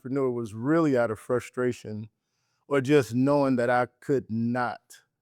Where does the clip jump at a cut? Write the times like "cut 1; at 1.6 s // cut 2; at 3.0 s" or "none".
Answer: none